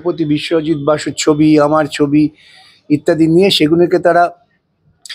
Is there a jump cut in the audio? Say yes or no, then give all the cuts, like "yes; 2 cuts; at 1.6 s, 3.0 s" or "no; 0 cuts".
no; 0 cuts